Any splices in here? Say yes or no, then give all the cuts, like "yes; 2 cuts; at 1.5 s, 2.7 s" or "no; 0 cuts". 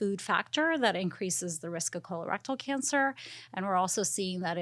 no; 0 cuts